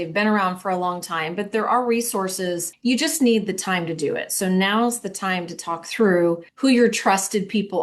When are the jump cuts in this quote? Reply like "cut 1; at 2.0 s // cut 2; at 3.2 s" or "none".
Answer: cut 1; at 2.7 s // cut 2; at 6.5 s